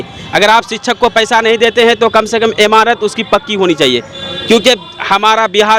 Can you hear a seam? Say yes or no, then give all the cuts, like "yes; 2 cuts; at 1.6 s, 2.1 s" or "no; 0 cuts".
no; 0 cuts